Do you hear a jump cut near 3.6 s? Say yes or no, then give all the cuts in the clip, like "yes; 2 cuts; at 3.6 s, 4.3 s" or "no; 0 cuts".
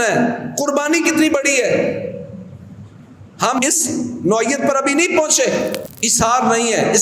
yes; 2 cuts; at 3.6 s, 5.9 s